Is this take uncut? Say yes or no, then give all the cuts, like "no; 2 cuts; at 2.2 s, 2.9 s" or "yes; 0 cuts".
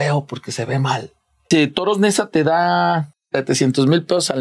no; 2 cuts; at 1.4 s, 3.2 s